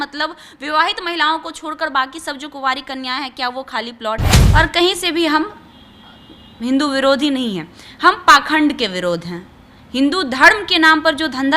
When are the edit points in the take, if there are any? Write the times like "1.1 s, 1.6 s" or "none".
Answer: 4.4 s